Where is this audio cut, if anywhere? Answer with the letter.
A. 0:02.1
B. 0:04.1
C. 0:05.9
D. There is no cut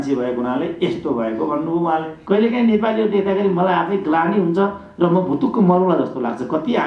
A